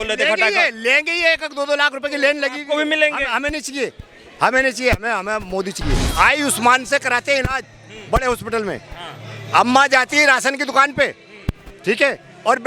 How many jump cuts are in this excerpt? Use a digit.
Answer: 1